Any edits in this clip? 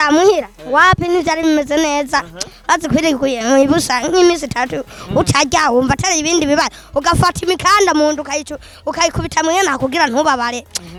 no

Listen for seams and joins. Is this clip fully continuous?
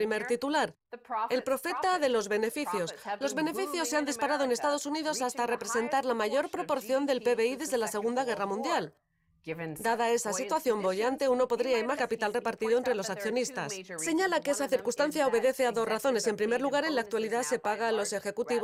yes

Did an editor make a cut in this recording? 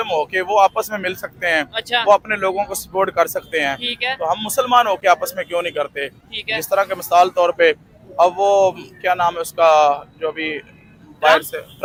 no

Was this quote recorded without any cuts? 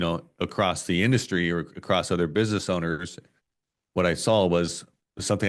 yes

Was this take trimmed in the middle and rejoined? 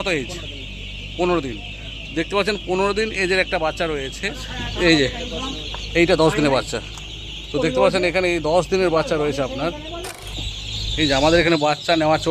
yes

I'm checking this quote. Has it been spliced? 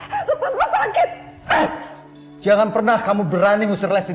no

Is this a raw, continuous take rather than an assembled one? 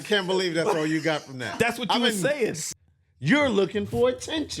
no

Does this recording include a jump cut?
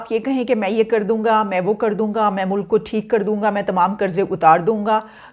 no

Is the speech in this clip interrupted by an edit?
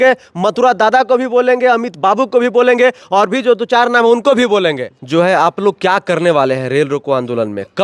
yes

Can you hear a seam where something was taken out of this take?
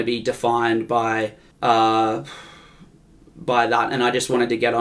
yes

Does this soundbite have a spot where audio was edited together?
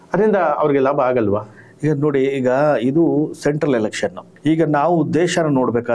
yes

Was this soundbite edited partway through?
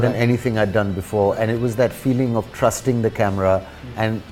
no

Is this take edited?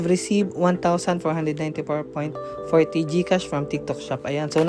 no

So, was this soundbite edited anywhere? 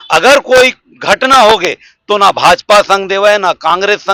no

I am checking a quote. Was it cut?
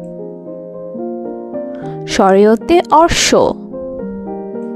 no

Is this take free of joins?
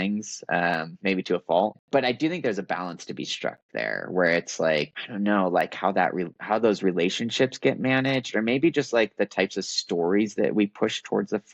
no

